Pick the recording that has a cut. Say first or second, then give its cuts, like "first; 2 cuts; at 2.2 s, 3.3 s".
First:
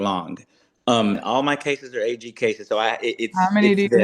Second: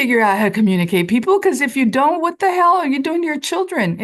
first; 1 cut; at 1.2 s